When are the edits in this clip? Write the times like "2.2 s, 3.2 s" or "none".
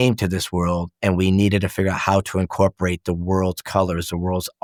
none